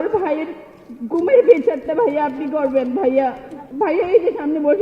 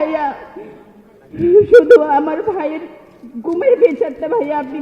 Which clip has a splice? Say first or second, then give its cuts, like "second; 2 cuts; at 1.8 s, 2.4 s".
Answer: first; 1 cut; at 3.5 s